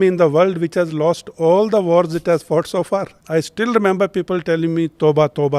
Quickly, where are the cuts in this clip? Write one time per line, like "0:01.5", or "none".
0:03.2